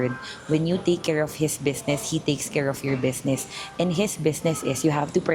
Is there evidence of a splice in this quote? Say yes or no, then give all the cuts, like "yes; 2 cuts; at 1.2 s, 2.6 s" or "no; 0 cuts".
no; 0 cuts